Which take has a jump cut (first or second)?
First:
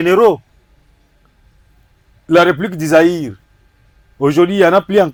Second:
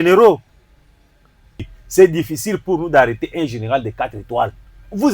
second